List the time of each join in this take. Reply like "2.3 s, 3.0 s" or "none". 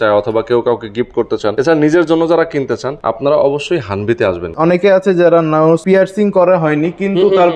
1.5 s, 2.9 s, 4.5 s, 5.8 s

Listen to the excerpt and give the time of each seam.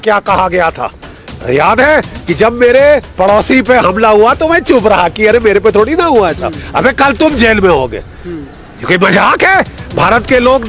none

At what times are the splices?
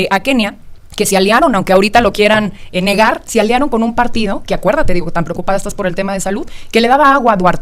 none

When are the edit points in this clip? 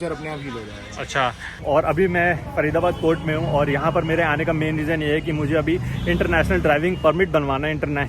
1.6 s

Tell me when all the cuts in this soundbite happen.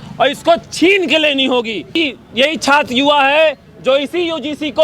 2.0 s

